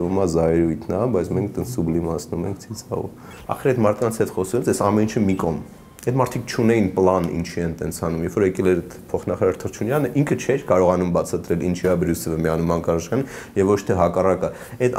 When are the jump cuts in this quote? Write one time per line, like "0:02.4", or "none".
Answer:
0:03.4